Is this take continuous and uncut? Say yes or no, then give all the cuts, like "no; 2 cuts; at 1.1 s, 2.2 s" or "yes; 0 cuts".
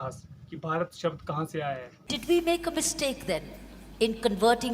no; 1 cut; at 1.9 s